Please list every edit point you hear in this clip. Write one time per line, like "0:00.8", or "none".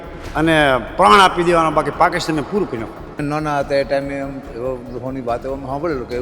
0:03.2